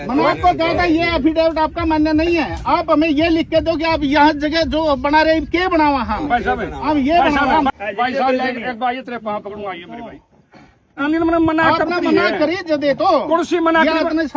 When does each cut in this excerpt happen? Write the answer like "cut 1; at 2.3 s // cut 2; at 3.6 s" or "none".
cut 1; at 7.7 s // cut 2; at 11.0 s